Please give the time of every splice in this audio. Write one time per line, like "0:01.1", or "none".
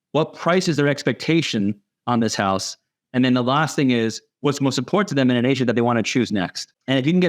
none